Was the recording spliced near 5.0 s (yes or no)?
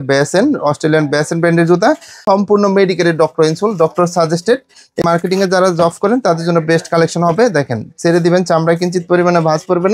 yes